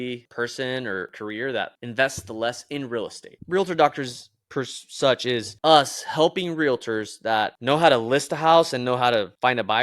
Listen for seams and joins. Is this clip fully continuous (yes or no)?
no